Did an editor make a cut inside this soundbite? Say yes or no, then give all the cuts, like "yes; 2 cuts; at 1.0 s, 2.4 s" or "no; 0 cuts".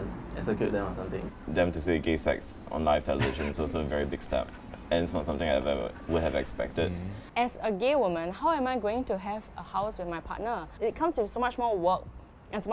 yes; 3 cuts; at 1.3 s, 7.2 s, 10.7 s